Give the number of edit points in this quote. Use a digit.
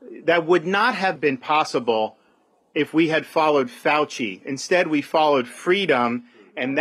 1